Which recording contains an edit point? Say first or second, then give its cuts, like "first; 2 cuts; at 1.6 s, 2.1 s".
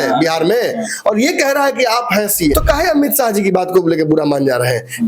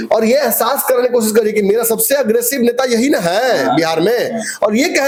first; 1 cut; at 2.5 s